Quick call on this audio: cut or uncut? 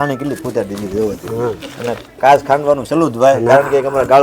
uncut